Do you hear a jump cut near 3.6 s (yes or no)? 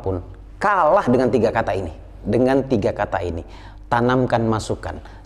no